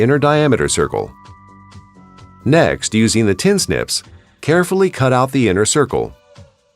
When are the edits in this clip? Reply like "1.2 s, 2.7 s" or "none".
1.1 s, 2.4 s